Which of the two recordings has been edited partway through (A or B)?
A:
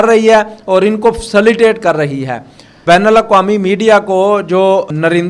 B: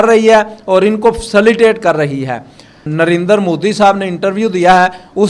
B